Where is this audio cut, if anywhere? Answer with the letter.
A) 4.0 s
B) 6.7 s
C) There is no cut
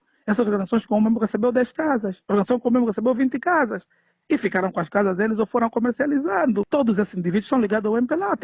B